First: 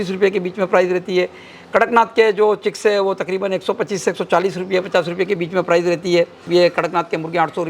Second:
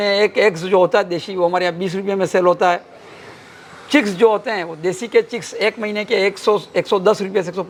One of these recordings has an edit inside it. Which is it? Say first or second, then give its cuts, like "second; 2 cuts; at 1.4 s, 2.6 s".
first; 1 cut; at 6.5 s